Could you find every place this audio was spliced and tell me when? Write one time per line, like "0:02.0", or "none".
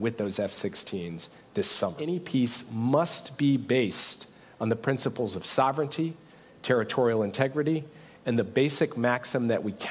0:02.1